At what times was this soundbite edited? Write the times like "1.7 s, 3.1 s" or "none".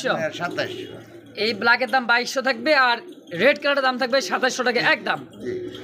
none